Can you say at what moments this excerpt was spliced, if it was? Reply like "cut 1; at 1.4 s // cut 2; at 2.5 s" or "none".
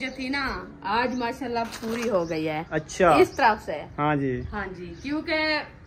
cut 1; at 2.6 s